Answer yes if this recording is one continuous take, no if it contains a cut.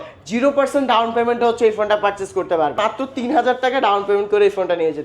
no